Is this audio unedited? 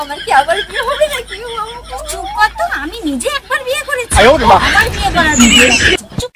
yes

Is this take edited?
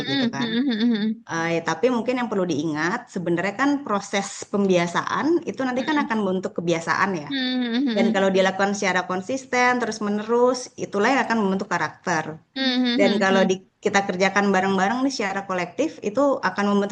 no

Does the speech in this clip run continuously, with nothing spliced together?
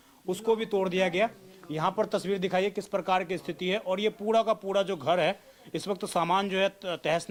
yes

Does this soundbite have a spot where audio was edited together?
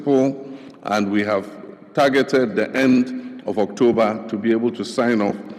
no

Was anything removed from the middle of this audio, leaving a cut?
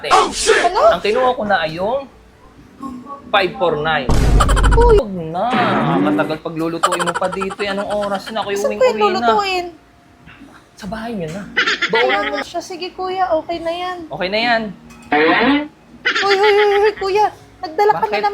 yes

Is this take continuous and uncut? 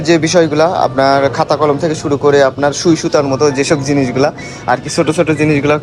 yes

